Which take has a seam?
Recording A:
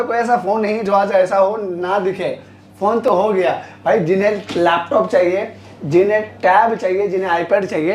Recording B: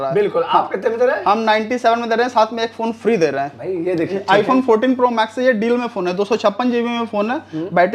B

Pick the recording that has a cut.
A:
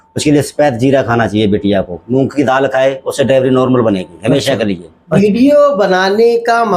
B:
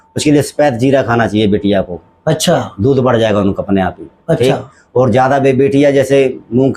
A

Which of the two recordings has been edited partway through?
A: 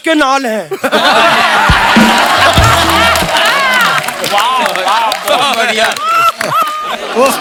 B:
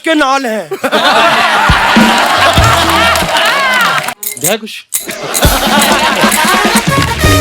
B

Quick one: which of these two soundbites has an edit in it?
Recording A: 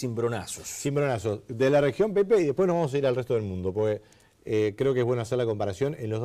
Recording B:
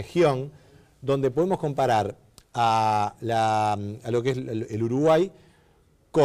A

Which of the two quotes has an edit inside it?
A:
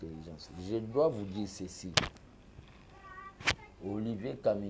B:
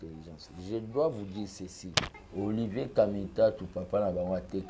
B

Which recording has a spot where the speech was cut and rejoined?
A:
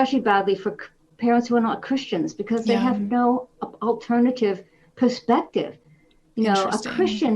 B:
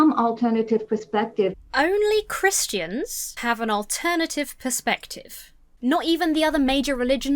B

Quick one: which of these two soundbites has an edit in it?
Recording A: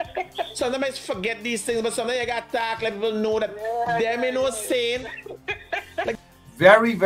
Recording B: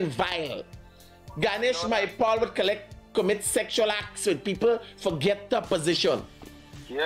A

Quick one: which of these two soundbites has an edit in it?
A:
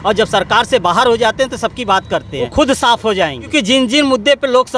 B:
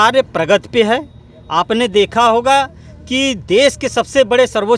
A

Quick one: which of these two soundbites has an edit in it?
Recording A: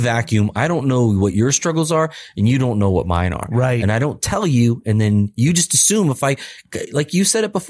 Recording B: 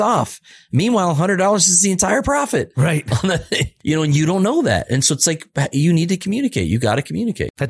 B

